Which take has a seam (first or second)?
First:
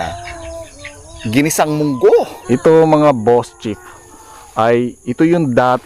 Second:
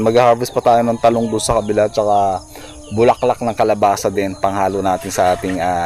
first